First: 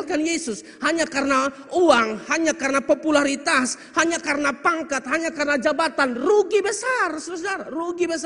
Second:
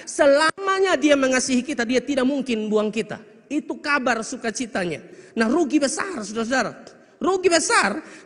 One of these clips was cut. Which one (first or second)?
second